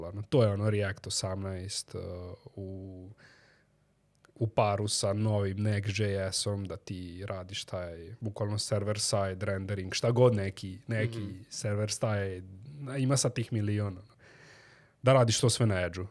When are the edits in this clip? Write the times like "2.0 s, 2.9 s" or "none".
8.1 s